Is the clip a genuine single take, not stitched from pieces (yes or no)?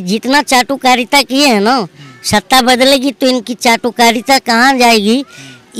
yes